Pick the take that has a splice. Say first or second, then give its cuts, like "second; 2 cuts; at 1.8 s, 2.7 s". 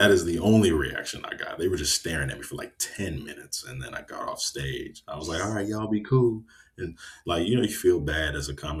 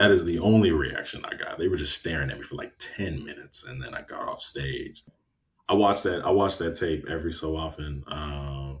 second; 1 cut; at 5.1 s